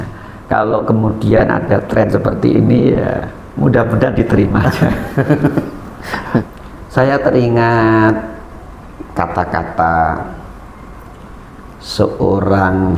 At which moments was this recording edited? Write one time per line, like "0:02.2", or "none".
0:06.5